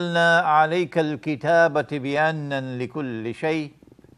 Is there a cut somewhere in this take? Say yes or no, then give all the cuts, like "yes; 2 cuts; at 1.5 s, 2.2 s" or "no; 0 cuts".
no; 0 cuts